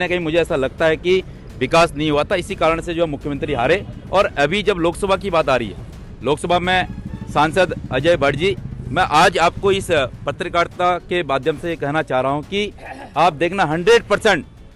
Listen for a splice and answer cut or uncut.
uncut